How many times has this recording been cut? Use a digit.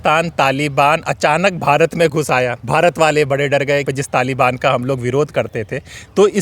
2